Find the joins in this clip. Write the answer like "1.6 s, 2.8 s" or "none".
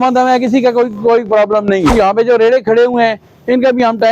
1.9 s